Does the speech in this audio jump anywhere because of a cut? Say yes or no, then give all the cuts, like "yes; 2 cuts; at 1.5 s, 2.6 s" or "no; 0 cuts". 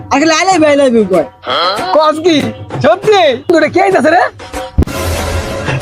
yes; 1 cut; at 3.5 s